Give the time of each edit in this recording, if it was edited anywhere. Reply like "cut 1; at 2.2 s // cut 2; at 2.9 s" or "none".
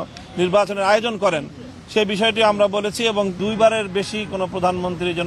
cut 1; at 3.4 s